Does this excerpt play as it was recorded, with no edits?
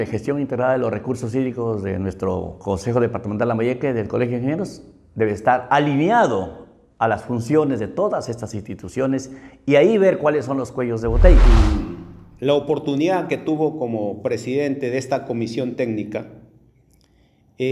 no; 1 cut; at 11.4 s

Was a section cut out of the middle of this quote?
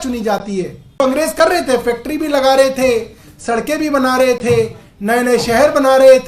yes; 1 cut; at 1.0 s

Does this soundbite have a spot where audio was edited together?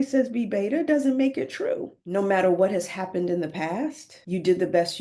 yes; 1 cut; at 2.0 s

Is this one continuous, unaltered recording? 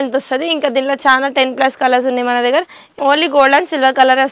no; 1 cut; at 2.8 s

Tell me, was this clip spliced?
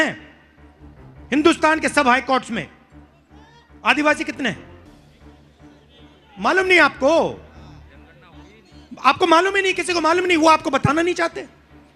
no; 0 cuts

